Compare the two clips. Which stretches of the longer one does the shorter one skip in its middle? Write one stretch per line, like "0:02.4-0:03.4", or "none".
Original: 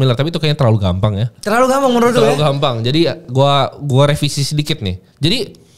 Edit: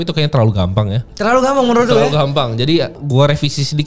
0:03.2-0:03.8